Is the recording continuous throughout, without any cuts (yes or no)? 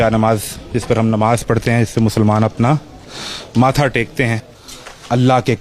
no